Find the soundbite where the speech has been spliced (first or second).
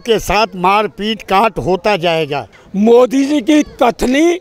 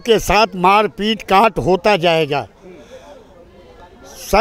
first